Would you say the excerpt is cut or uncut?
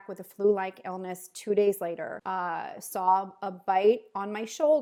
uncut